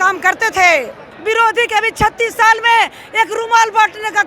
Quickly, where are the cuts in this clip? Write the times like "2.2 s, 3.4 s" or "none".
1.0 s